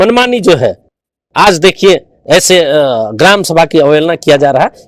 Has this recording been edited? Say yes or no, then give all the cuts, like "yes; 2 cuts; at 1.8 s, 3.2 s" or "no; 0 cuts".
no; 0 cuts